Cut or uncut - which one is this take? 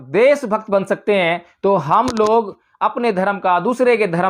uncut